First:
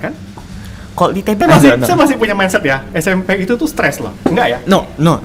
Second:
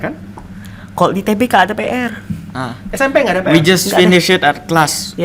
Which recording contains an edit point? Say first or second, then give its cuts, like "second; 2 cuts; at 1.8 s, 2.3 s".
first; 1 cut; at 1.4 s